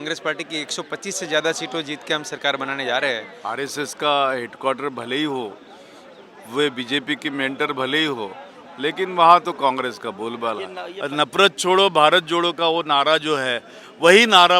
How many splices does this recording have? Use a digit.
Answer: 2